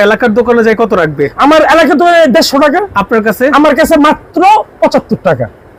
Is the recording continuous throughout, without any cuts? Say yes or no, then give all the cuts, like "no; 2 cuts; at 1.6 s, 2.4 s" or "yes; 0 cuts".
yes; 0 cuts